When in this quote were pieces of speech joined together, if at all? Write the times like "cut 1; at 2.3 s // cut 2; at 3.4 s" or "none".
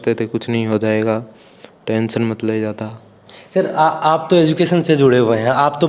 none